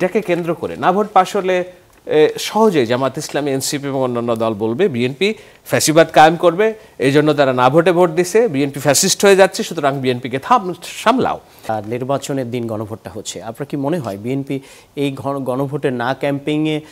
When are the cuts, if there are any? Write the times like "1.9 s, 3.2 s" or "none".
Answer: 11.7 s